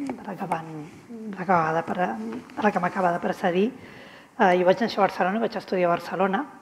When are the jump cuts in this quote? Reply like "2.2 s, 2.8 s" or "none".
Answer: 4.2 s